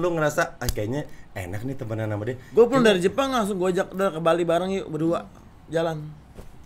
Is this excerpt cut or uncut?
uncut